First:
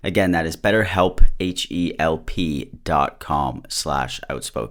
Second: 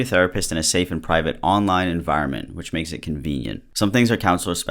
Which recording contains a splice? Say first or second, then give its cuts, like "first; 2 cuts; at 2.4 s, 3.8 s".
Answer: second; 1 cut; at 3.7 s